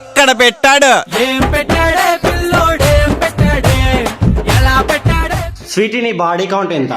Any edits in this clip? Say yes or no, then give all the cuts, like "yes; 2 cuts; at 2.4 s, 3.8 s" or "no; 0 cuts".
yes; 1 cut; at 5.6 s